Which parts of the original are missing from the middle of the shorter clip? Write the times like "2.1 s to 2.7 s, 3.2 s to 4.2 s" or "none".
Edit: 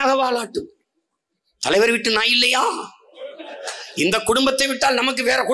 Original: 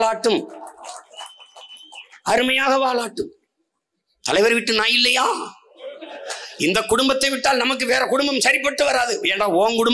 none